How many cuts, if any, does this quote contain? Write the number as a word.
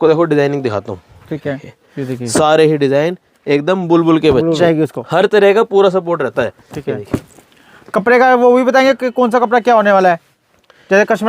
one